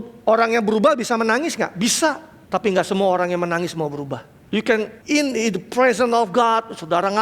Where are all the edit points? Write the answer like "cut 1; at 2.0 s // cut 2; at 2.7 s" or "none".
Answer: cut 1; at 2.3 s // cut 2; at 4.3 s // cut 3; at 5.0 s